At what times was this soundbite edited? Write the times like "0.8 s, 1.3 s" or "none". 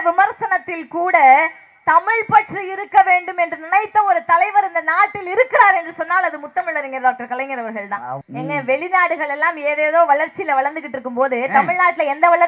8.2 s